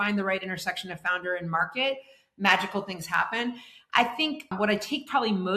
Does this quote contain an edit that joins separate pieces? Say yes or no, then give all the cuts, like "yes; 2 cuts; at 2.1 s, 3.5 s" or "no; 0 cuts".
no; 0 cuts